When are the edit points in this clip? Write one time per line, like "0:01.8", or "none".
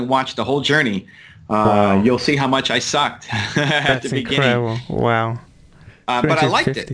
none

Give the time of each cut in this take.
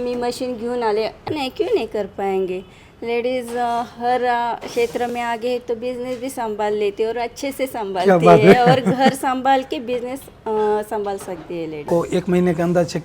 0:01.2
0:11.8

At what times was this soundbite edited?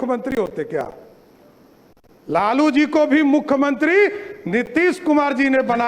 none

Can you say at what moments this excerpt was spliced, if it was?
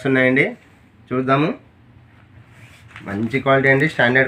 none

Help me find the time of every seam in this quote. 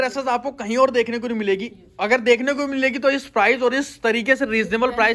none

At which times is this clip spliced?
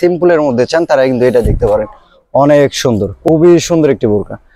0:03.2

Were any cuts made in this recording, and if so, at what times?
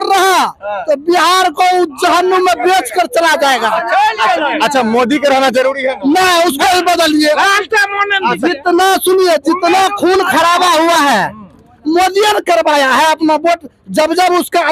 none

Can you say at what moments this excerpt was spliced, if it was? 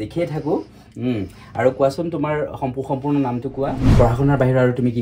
0:03.9

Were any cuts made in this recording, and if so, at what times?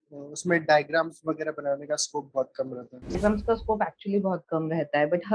0:03.2

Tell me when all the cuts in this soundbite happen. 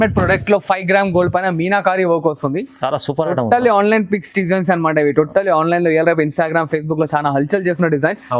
none

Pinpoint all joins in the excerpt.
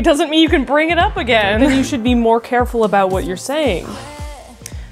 none

